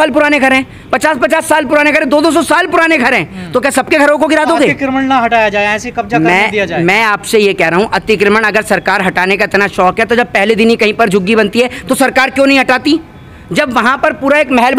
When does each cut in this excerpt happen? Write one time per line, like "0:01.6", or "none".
none